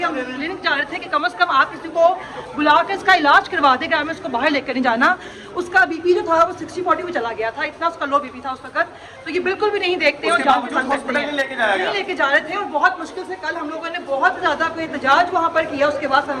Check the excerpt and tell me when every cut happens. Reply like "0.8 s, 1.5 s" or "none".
none